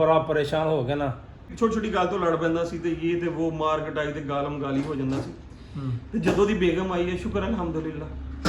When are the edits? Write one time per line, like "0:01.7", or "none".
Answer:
0:01.5

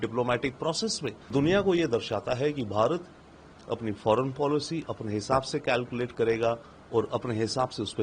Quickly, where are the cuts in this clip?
0:01.3

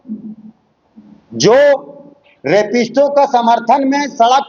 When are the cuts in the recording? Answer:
none

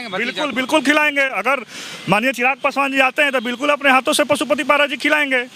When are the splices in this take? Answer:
none

